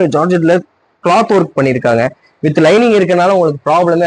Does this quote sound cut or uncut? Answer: uncut